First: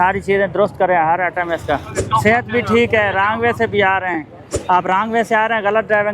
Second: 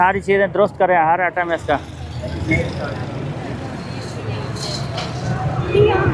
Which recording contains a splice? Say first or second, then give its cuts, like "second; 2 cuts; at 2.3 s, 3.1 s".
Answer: first; 2 cuts; at 1.9 s, 4.5 s